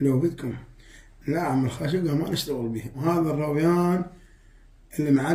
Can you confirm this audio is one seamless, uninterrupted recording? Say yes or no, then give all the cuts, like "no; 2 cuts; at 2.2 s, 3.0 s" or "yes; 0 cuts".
no; 1 cut; at 3.0 s